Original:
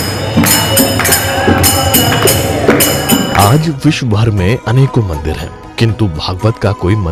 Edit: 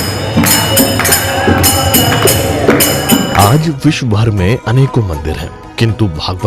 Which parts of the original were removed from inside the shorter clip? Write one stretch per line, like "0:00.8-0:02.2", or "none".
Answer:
none